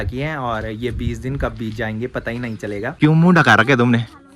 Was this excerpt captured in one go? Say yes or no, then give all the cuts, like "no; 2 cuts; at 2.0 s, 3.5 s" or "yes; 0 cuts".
no; 1 cut; at 2.9 s